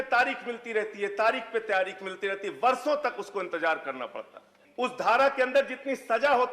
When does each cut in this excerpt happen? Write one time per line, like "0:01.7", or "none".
0:04.6